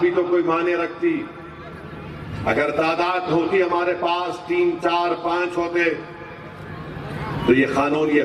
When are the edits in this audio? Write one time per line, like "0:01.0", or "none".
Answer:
none